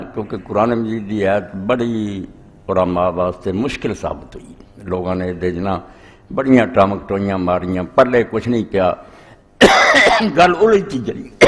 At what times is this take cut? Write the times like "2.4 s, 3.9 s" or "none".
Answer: 10.5 s